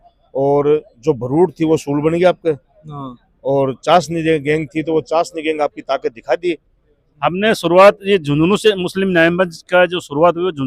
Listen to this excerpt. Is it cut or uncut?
cut